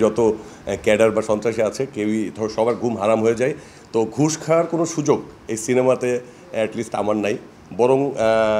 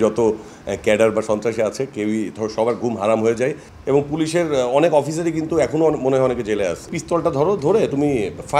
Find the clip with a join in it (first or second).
second